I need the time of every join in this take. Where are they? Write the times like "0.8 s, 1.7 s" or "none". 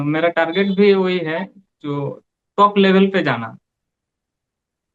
none